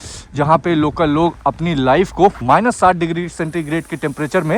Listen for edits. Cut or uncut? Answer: cut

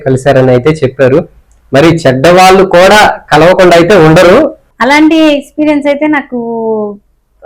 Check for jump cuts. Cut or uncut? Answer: cut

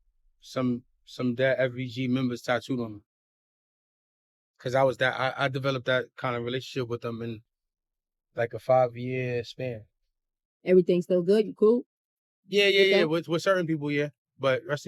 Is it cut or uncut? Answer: uncut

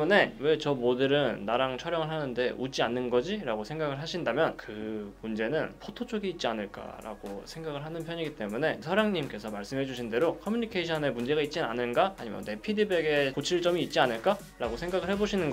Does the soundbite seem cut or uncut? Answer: cut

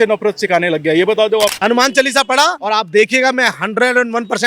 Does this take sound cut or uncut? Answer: cut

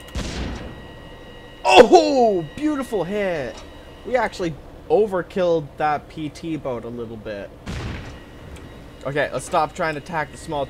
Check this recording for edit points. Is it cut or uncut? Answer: cut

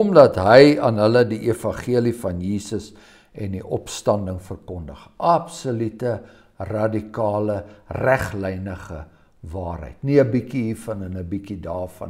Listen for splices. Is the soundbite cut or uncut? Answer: uncut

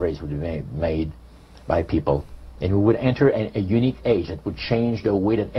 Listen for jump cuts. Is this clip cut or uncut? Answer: uncut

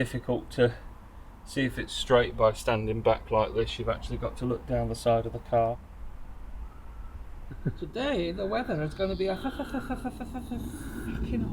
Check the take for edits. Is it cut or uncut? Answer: cut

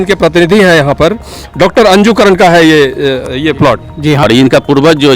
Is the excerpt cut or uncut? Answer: cut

